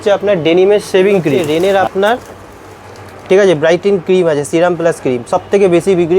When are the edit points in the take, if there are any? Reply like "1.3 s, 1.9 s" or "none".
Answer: 1.4 s